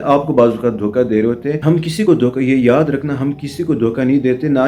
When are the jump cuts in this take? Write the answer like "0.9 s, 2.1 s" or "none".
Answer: 2.1 s